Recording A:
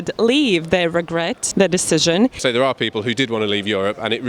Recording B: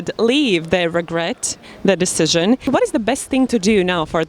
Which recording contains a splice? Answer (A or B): A